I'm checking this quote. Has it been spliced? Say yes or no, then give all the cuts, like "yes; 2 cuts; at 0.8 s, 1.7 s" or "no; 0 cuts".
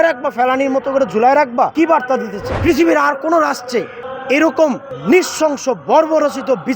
yes; 2 cuts; at 2.0 s, 4.9 s